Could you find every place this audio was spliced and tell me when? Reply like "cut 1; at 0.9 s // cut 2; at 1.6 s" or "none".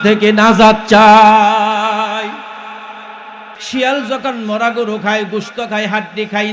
cut 1; at 3.5 s